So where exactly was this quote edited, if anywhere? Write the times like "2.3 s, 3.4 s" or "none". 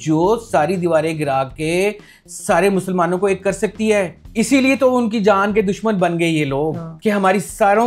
4.2 s, 6.9 s